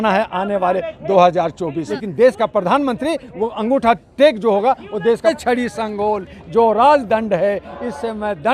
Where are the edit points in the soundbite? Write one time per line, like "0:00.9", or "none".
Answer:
0:02.3
0:05.5